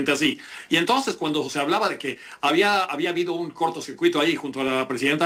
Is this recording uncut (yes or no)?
yes